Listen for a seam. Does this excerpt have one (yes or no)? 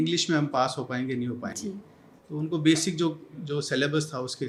no